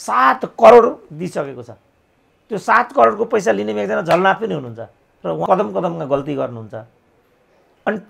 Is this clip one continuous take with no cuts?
no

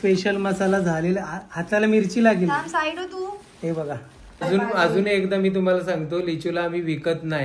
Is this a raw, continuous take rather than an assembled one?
no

